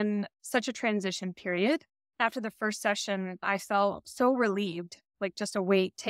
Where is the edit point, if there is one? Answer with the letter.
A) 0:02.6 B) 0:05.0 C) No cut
C